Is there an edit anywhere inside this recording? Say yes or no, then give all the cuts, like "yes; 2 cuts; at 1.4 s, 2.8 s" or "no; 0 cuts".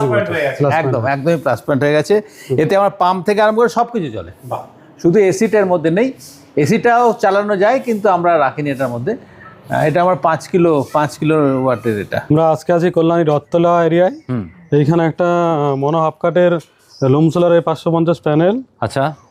no; 0 cuts